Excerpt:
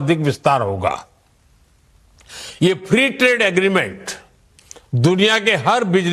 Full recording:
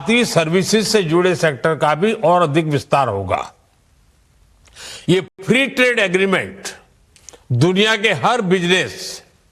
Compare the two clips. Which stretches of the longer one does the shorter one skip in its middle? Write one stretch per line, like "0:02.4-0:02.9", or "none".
0:05.3-0:05.4